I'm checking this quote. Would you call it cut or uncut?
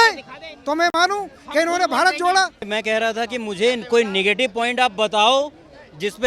cut